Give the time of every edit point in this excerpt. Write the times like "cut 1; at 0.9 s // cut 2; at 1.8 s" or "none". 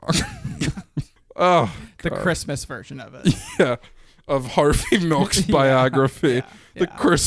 cut 1; at 1.2 s